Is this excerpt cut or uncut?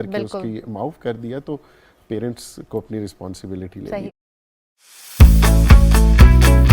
cut